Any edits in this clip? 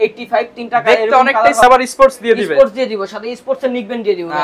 yes; 1 cut; at 1.6 s

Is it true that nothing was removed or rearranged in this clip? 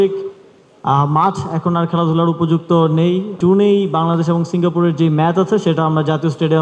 no; 1 cut; at 3.4 s

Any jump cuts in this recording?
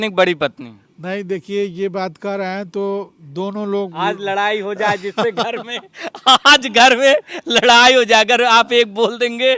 no; 0 cuts

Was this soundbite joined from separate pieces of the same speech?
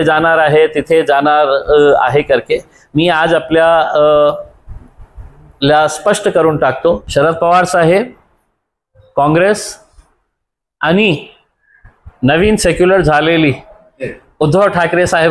yes; 1 cut; at 7.0 s

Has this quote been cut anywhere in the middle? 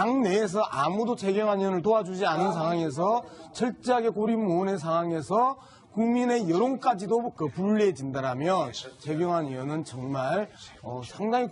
yes; 1 cut; at 2.9 s

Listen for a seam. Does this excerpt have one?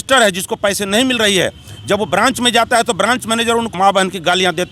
yes; 1 cut; at 3.7 s

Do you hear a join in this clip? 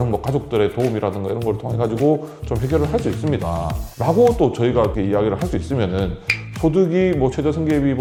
no; 0 cuts

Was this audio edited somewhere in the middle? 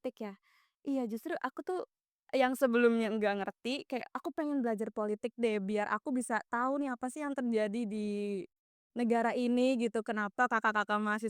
no; 0 cuts

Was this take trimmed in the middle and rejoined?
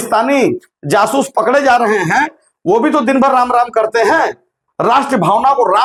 no; 0 cuts

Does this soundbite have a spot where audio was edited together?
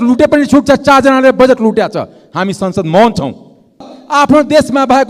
yes; 1 cut; at 3.9 s

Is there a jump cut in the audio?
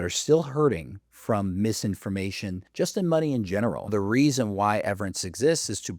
yes; 2 cuts; at 2.6 s, 3.9 s

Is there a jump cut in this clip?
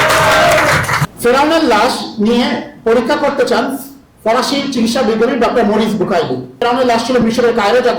yes; 2 cuts; at 1.0 s, 6.6 s

